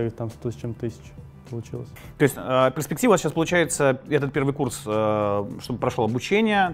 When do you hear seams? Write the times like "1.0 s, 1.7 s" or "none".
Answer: none